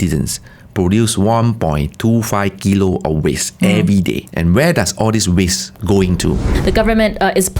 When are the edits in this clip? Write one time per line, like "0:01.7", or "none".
0:04.3
0:05.7
0:06.5